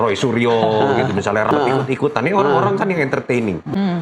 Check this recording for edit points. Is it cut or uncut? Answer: cut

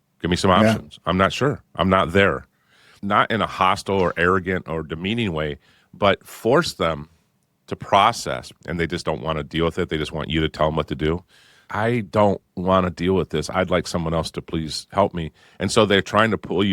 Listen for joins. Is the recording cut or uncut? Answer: cut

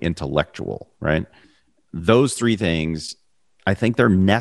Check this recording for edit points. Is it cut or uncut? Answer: cut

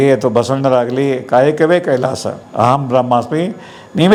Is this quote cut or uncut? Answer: uncut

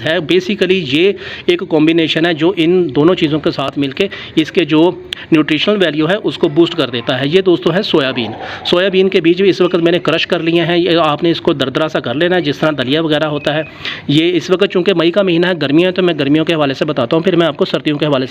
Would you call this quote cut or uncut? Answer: uncut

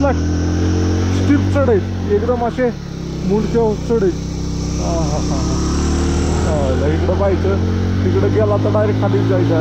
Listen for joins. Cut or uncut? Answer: uncut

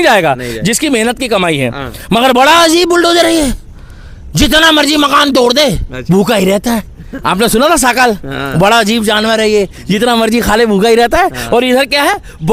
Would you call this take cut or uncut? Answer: uncut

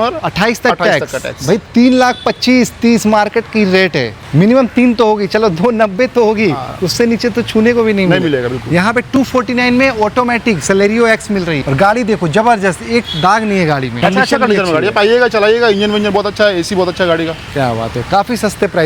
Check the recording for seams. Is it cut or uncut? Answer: uncut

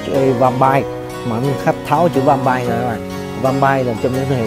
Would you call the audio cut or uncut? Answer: uncut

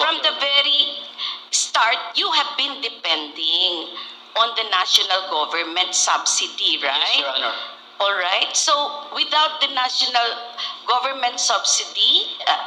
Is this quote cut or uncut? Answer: uncut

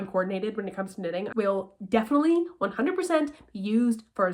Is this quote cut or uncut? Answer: cut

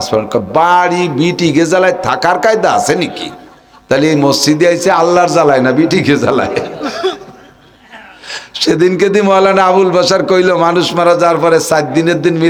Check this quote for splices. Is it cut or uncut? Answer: uncut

